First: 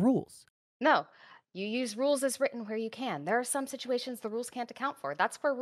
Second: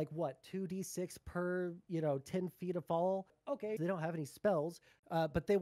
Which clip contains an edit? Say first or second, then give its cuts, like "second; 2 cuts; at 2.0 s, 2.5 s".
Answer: second; 1 cut; at 3.8 s